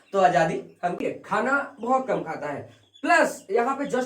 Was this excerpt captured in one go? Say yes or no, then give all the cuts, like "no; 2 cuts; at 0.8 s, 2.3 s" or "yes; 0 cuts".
no; 1 cut; at 1.0 s